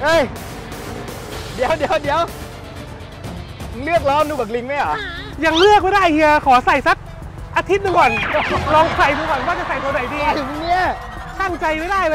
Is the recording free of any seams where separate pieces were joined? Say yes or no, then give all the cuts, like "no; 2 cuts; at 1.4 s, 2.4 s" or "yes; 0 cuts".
yes; 0 cuts